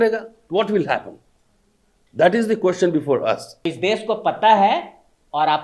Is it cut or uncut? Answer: cut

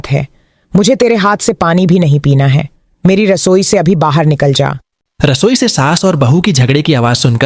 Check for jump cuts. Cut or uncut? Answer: uncut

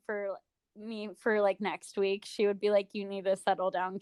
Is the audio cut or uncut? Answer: uncut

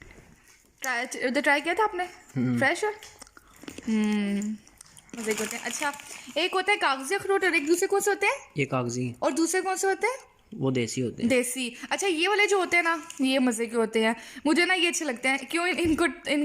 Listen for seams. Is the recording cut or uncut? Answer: cut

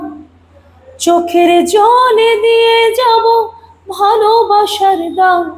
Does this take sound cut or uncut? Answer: uncut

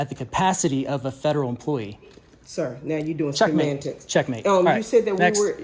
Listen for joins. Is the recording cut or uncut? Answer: uncut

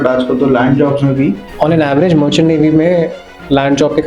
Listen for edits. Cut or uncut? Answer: cut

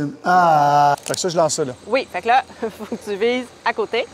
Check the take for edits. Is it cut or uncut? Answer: cut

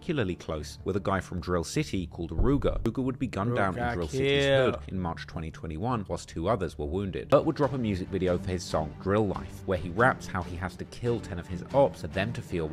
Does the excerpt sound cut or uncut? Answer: cut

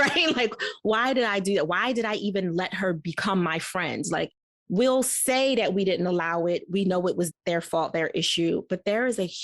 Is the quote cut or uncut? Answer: cut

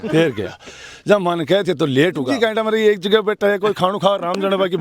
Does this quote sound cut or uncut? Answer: cut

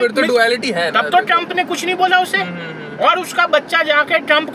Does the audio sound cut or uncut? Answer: uncut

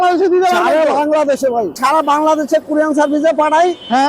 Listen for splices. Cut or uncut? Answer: cut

